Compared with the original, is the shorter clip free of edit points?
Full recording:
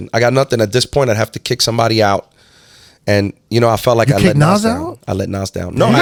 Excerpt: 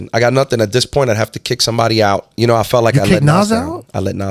no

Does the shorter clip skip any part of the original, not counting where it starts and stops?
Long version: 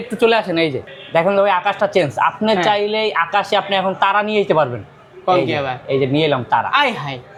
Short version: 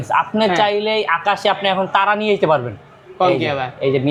no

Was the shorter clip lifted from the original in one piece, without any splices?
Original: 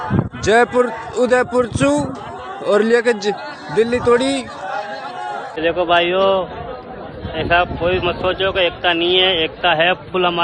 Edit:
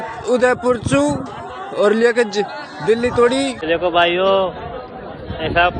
no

